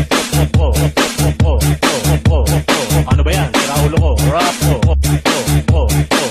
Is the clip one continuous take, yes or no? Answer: no